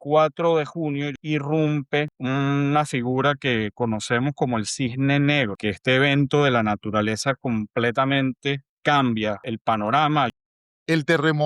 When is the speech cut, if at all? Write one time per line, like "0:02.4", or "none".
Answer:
0:01.1
0:02.2
0:05.6
0:08.7
0:09.4
0:10.3